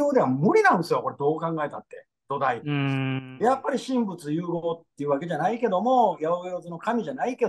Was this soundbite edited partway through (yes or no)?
yes